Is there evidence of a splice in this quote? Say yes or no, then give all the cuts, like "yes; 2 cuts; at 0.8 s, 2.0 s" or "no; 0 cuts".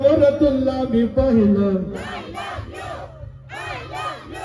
no; 0 cuts